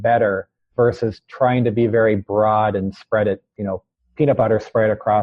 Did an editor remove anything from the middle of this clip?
yes; 1 cut; at 3.7 s

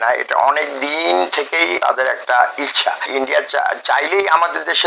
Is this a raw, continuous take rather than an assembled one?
no; 2 cuts; at 1.8 s, 3.1 s

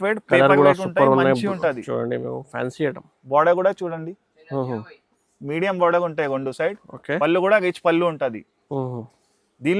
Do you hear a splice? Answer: no; 0 cuts

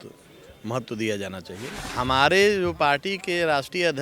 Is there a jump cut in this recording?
yes; 1 cut; at 1.7 s

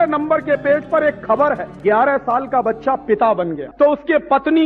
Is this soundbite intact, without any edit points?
no; 2 cuts; at 1.7 s, 3.6 s

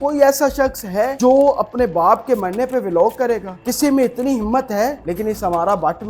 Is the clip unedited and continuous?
no; 3 cuts; at 1.1 s, 3.5 s, 5.0 s

